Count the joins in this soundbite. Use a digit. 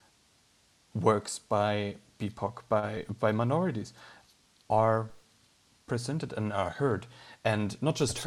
0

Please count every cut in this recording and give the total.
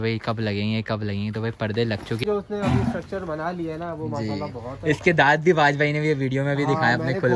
1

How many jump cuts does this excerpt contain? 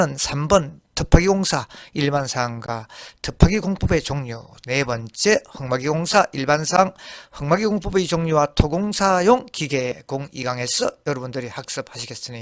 1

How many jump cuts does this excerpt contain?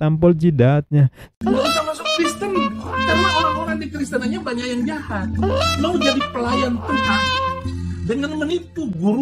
1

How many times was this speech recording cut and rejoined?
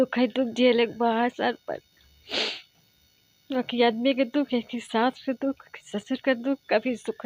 0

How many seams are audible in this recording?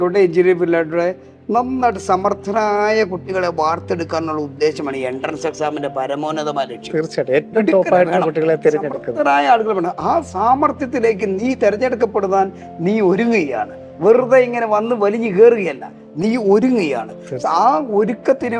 0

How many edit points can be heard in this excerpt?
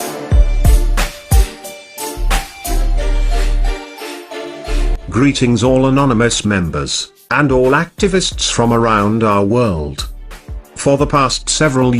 1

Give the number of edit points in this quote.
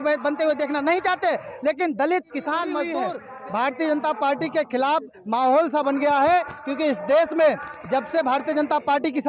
1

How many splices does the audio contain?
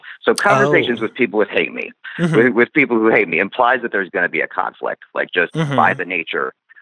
0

